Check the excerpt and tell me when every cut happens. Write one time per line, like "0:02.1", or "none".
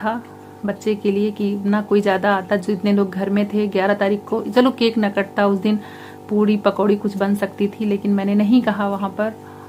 none

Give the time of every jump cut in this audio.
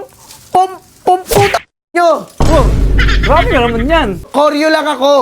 0:04.3

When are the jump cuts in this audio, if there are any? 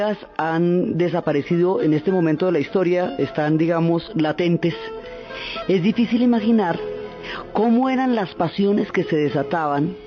0:06.7

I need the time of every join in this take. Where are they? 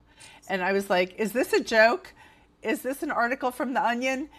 none

